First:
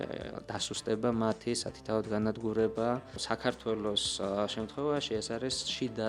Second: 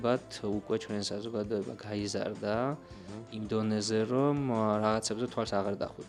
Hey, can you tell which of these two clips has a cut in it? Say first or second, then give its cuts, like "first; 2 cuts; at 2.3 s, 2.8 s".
first; 1 cut; at 3.2 s